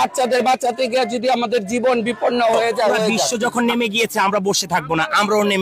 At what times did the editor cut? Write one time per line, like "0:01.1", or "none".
0:03.2

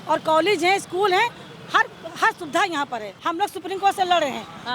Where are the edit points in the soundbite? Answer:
0:03.1

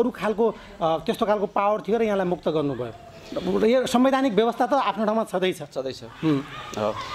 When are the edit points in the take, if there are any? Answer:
none

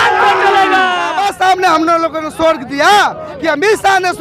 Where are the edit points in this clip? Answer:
0:01.2

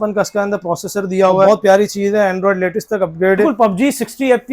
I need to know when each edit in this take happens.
0:01.5
0:03.4

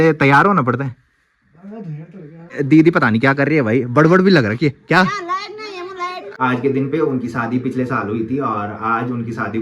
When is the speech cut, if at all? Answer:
0:02.6
0:06.2

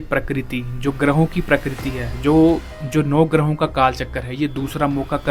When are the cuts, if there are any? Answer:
none

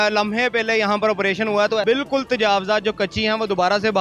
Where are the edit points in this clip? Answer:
0:01.8

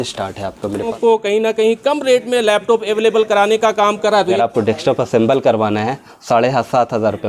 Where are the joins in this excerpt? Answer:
0:00.9
0:04.4

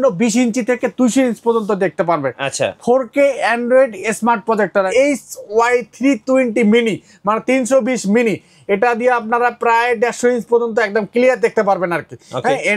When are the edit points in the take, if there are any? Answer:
0:04.9

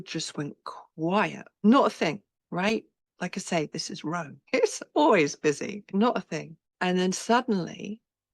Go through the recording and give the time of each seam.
0:01.6
0:02.3
0:03.0
0:04.4
0:05.9
0:06.6

